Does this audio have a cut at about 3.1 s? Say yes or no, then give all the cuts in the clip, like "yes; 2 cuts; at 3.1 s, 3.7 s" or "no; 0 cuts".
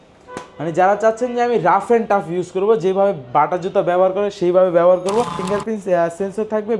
no; 1 cut; at 5.4 s